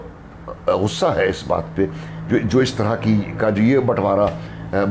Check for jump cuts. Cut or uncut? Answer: uncut